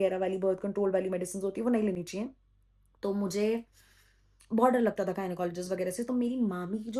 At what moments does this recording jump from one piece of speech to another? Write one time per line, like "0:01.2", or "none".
none